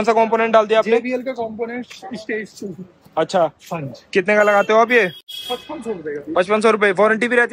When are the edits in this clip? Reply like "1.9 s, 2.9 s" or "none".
none